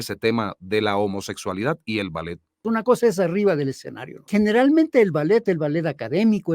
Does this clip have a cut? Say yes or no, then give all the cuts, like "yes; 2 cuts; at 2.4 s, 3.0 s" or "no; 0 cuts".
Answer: yes; 2 cuts; at 2.6 s, 4.2 s